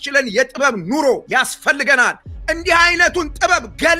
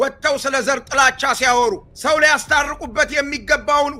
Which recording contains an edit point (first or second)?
first